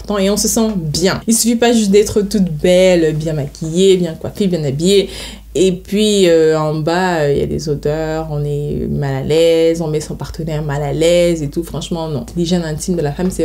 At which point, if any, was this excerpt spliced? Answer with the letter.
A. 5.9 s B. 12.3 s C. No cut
B